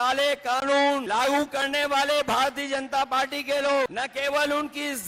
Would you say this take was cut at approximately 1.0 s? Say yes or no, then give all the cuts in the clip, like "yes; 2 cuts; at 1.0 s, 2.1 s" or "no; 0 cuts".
yes; 2 cuts; at 1.0 s, 3.9 s